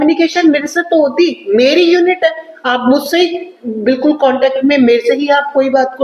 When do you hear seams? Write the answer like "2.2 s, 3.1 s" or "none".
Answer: none